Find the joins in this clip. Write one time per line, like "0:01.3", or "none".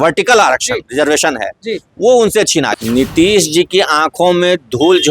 0:02.7